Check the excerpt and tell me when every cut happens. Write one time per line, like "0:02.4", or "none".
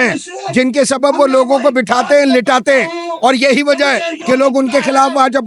none